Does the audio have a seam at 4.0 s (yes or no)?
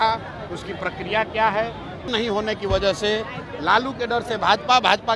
no